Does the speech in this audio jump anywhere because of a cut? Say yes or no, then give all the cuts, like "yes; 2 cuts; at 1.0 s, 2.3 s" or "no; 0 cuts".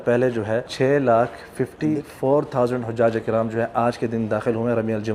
no; 0 cuts